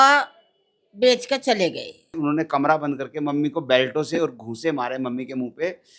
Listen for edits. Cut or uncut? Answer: cut